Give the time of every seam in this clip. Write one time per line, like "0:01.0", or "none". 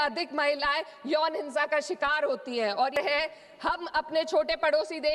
0:02.9